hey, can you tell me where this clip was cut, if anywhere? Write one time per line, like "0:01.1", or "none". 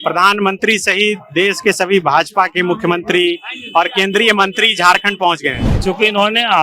0:05.7